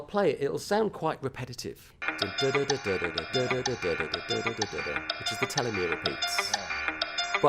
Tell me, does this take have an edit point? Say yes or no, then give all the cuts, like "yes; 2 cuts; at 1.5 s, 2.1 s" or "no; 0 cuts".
yes; 1 cut; at 2.0 s